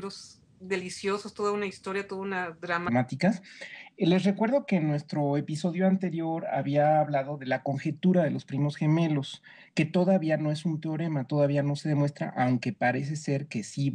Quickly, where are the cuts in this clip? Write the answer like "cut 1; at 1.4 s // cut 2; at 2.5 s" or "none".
none